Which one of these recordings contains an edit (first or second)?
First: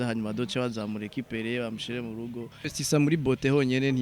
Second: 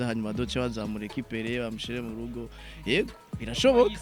first